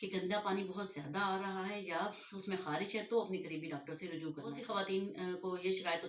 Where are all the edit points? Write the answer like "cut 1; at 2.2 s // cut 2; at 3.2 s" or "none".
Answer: cut 1; at 4.6 s

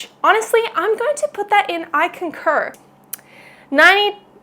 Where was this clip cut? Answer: cut 1; at 2.7 s

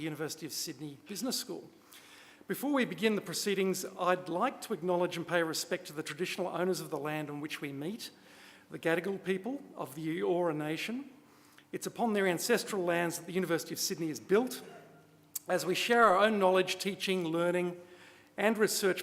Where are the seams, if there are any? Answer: cut 1; at 10.4 s

